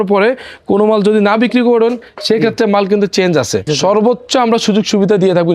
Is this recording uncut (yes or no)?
no